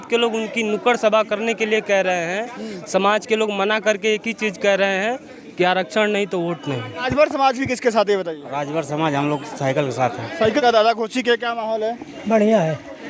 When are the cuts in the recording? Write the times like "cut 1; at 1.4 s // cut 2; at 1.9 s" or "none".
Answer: cut 1; at 7.0 s // cut 2; at 10.6 s